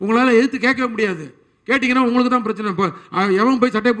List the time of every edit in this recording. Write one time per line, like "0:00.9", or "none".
none